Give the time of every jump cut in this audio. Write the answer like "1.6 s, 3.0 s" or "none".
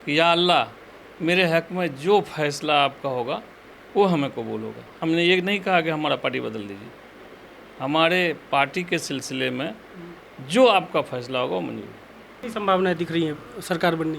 12.4 s